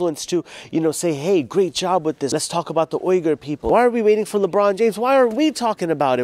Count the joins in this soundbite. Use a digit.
2